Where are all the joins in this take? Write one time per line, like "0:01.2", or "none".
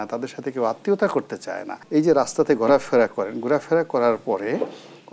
0:01.7